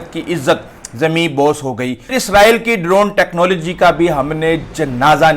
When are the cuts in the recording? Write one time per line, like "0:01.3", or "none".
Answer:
0:02.2